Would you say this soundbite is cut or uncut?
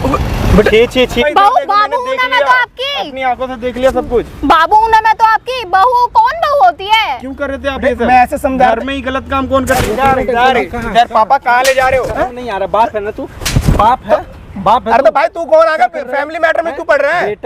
cut